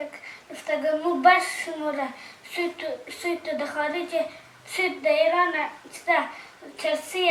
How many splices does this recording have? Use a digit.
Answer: 0